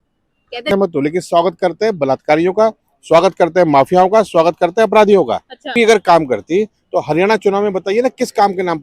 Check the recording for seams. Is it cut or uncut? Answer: cut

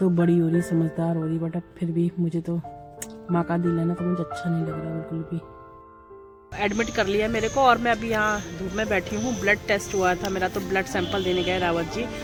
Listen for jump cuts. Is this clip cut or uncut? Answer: uncut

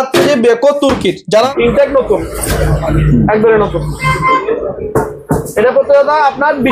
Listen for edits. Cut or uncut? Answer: cut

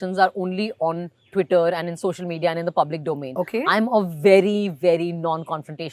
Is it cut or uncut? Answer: uncut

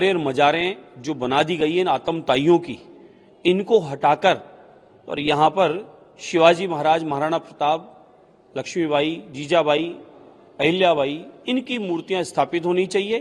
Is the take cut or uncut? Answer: uncut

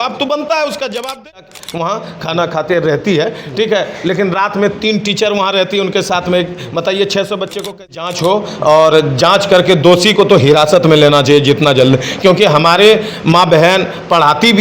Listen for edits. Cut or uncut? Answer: cut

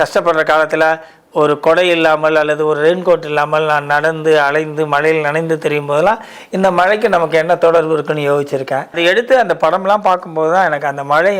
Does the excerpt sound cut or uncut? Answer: cut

